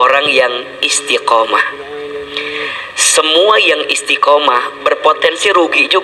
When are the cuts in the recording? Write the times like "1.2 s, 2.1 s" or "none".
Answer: none